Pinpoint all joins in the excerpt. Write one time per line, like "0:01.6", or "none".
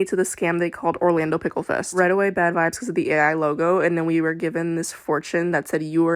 none